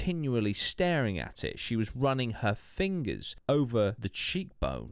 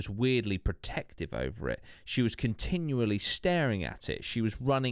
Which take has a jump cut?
first; 2 cuts; at 3.3 s, 4.0 s

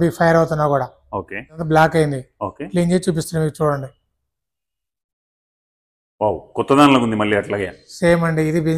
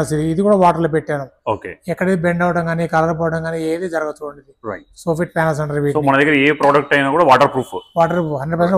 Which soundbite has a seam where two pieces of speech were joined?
first; 1 cut; at 1.6 s

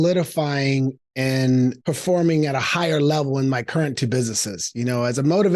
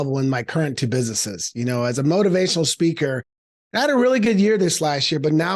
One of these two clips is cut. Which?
first; 1 cut; at 1.8 s

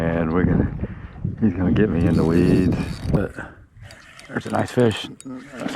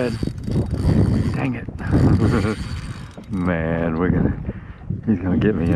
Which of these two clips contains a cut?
first; 1 cut; at 3.2 s

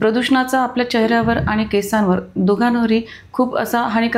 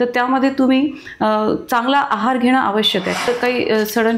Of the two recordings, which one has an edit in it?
second; 1 cut; at 3.3 s

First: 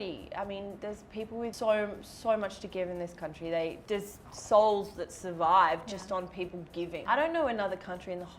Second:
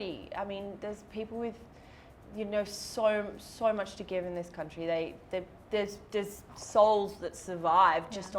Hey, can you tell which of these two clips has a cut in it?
first; 3 cuts; at 1.5 s, 3.8 s, 7.0 s

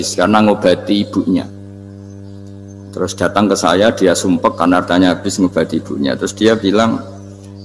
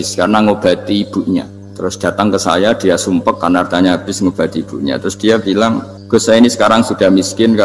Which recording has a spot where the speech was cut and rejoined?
second; 2 cuts; at 1.6 s, 5.9 s

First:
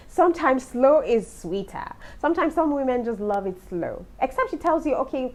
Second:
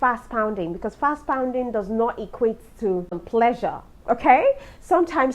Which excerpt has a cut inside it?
second; 1 cut; at 3.2 s

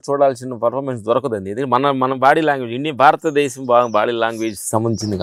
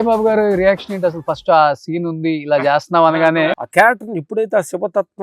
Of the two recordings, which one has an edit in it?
second; 1 cut; at 3.5 s

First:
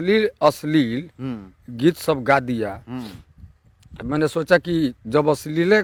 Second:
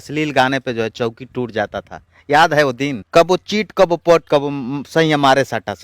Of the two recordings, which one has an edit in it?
second; 1 cut; at 3.0 s

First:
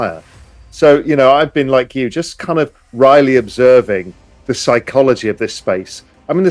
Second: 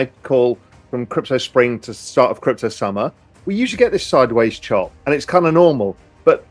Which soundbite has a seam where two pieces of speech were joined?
second; 1 cut; at 4.9 s

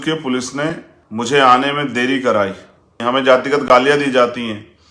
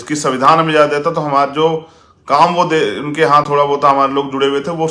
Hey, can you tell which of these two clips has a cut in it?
first; 2 cuts; at 0.9 s, 3.0 s

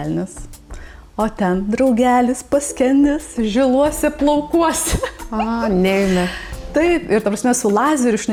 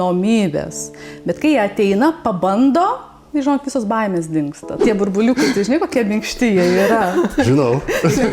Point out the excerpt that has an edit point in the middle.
second; 1 cut; at 4.8 s

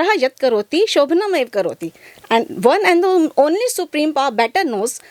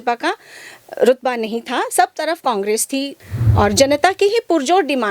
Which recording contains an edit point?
second; 1 cut; at 3.2 s

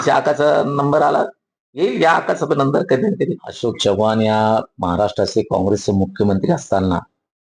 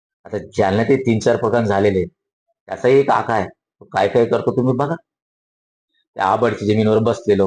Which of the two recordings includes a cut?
first; 1 cut; at 3.5 s

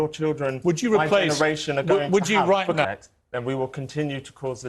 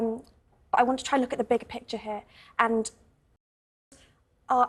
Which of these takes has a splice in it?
first; 1 cut; at 2.9 s

